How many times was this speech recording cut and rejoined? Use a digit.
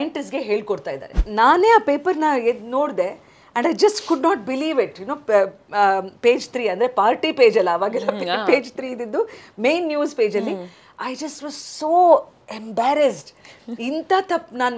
1